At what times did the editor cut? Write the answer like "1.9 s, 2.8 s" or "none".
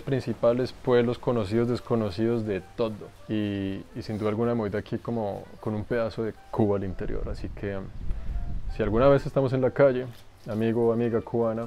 none